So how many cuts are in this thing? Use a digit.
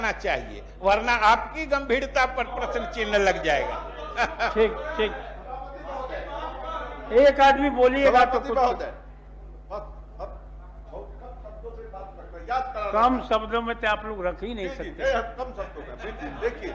0